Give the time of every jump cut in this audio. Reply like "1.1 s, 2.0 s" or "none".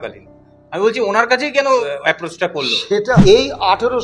1.8 s, 3.1 s